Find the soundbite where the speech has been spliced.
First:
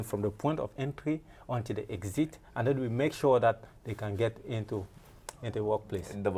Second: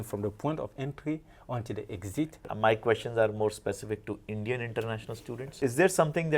second; 2 cuts; at 2.5 s, 5.5 s

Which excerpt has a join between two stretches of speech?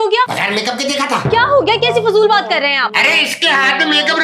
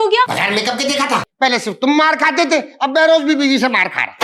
second; 1 cut; at 1.2 s

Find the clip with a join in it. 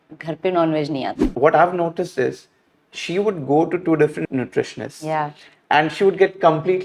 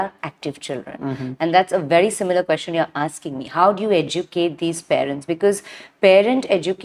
first; 2 cuts; at 1.3 s, 4.2 s

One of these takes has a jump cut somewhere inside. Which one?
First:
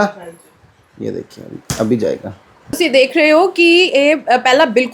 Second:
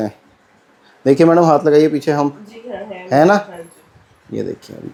first; 1 cut; at 2.7 s

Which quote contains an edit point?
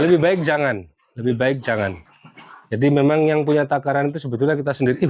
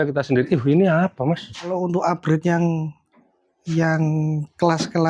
second; 1 cut; at 1.8 s

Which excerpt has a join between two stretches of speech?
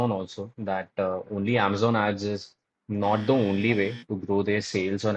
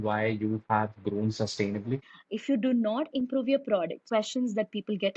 second; 2 cuts; at 2.1 s, 4.0 s

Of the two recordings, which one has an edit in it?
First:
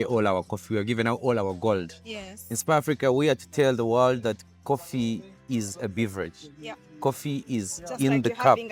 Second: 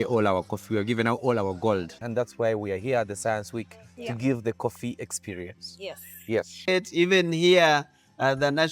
second; 2 cuts; at 2.0 s, 6.6 s

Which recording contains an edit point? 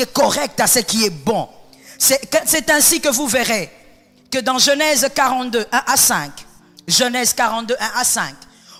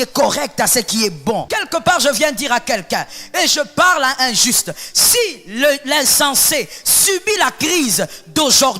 second; 1 cut; at 1.6 s

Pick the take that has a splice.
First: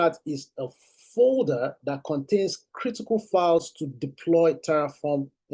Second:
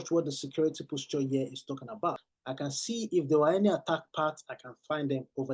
second; 1 cut; at 2.3 s

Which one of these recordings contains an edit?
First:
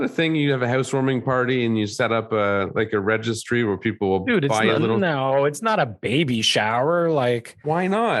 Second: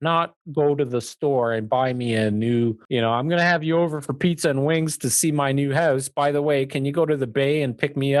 second; 1 cut; at 2.8 s

